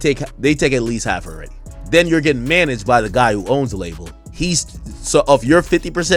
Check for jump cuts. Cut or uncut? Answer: uncut